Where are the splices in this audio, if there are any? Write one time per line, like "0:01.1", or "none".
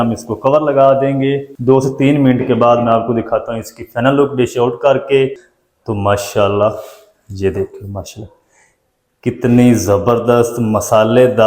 0:01.5
0:05.4